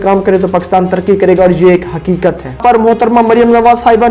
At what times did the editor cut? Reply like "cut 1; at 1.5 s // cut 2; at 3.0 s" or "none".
cut 1; at 2.6 s

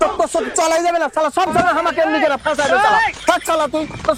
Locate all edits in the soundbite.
none

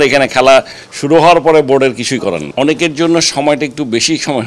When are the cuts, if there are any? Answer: cut 1; at 2.4 s

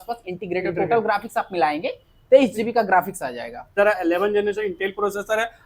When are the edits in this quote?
cut 1; at 3.8 s

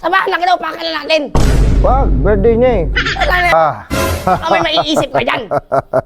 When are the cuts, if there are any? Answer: cut 1; at 3.5 s

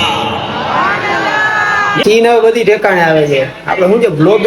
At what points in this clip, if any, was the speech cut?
cut 1; at 2.0 s

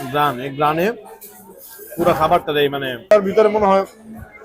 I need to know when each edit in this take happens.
cut 1; at 3.1 s

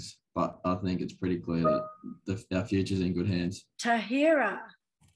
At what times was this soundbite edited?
cut 1; at 3.7 s

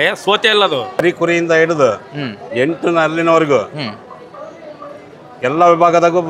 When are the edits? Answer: cut 1; at 1.0 s

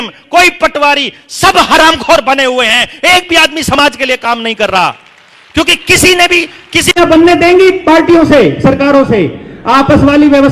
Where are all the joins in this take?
cut 1; at 6.9 s

